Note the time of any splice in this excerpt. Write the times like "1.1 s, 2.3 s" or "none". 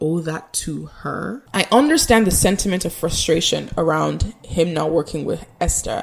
1.4 s